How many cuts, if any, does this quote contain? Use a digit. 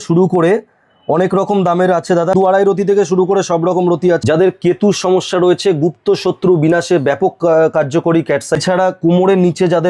3